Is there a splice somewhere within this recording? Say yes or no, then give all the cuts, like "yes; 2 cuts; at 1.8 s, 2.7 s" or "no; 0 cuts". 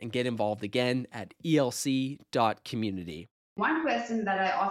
yes; 1 cut; at 3.6 s